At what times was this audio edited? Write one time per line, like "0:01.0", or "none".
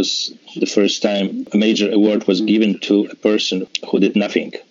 0:01.5
0:03.7